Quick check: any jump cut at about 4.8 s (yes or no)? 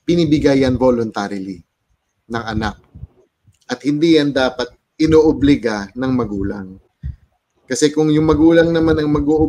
no